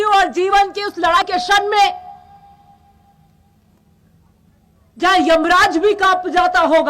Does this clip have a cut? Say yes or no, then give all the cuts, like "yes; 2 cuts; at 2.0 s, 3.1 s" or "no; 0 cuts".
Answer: yes; 1 cut; at 1.2 s